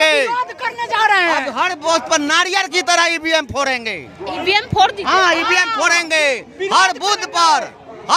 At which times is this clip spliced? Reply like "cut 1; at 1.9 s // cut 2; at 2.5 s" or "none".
none